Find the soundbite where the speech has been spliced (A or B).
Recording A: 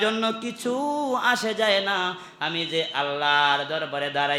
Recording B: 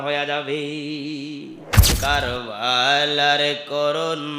B